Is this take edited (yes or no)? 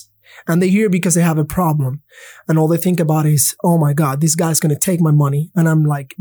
no